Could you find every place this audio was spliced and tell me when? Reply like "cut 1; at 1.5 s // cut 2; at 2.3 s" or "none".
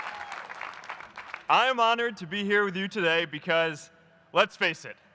cut 1; at 1.0 s